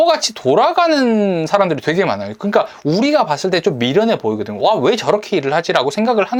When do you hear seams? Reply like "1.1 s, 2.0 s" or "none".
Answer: none